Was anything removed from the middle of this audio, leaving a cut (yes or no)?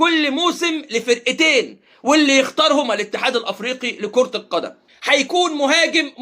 yes